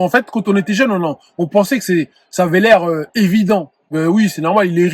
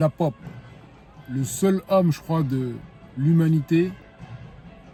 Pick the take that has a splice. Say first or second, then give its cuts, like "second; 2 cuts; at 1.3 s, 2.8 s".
first; 1 cut; at 3.9 s